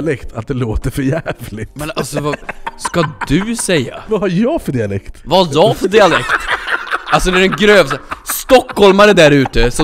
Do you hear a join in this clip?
yes; 2 cuts; at 4.0 s, 5.1 s

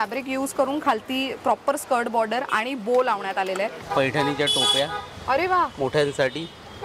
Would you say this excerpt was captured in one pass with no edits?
no; 1 cut; at 3.8 s

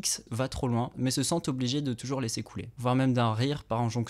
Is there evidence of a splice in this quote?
no; 0 cuts

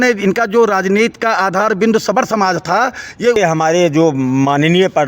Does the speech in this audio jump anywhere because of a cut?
yes; 1 cut; at 3.4 s

